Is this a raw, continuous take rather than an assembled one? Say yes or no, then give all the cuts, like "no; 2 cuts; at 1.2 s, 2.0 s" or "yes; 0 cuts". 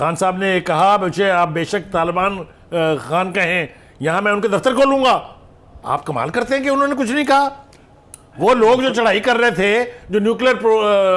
yes; 0 cuts